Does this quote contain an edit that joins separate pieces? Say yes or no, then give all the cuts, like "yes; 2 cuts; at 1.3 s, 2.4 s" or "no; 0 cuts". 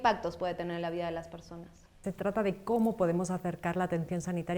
yes; 1 cut; at 2.0 s